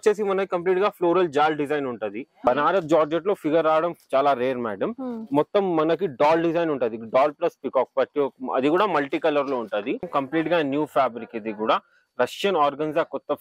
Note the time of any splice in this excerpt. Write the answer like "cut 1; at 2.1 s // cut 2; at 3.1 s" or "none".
cut 1; at 2.5 s // cut 2; at 10.1 s